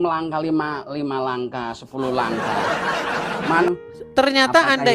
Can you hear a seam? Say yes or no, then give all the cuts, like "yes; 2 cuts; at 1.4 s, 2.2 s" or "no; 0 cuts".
yes; 1 cut; at 3.6 s